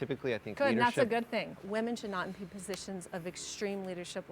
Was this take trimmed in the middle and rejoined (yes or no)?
yes